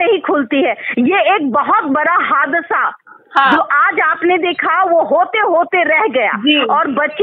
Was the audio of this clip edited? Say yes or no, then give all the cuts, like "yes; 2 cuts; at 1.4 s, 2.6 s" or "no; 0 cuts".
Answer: no; 0 cuts